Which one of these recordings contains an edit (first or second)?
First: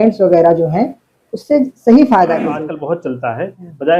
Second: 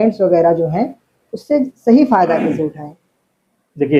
first